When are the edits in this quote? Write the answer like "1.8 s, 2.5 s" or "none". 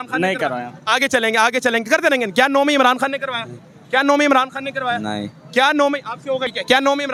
none